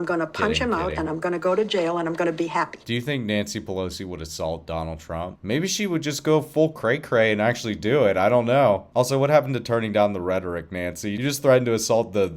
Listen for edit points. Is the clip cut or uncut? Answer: cut